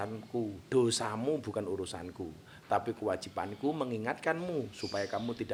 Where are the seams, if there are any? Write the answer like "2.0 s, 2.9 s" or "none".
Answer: none